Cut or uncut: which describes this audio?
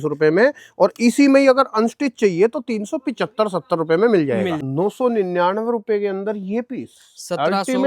cut